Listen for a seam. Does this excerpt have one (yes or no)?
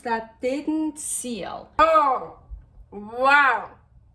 yes